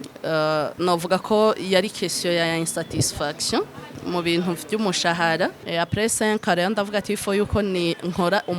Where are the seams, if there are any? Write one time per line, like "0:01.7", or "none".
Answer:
0:04.0
0:05.6